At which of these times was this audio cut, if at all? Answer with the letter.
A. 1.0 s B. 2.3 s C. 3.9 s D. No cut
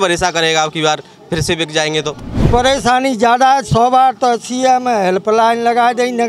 B